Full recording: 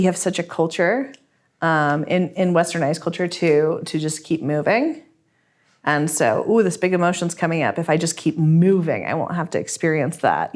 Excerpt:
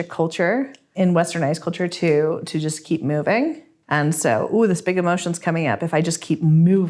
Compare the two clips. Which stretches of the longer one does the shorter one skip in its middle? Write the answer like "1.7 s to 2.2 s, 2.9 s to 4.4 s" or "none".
1.3 s to 2.3 s, 5.1 s to 5.7 s